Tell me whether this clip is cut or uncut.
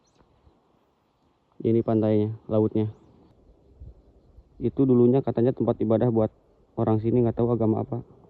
cut